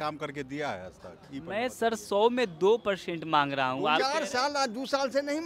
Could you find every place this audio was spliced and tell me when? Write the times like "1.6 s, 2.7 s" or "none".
4.1 s